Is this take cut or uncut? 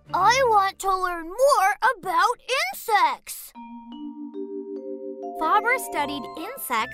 cut